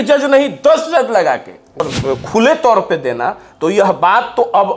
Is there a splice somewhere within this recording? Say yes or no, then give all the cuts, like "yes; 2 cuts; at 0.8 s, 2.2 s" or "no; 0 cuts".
yes; 1 cut; at 1.8 s